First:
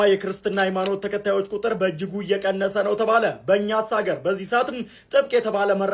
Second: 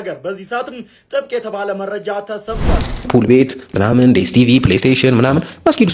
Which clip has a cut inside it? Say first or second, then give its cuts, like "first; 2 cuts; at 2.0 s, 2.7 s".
second; 1 cut; at 2.9 s